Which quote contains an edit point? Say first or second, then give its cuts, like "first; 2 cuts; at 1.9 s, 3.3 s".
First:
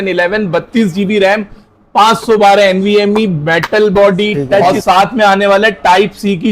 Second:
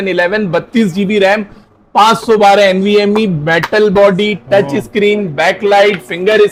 first; 1 cut; at 4.6 s